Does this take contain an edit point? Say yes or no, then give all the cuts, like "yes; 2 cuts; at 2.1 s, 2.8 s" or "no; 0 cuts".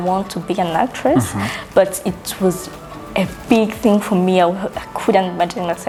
no; 0 cuts